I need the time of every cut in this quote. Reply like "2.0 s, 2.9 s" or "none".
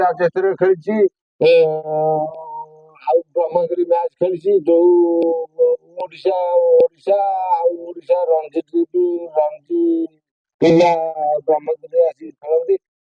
none